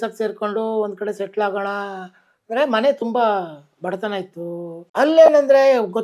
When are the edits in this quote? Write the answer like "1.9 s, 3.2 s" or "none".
4.8 s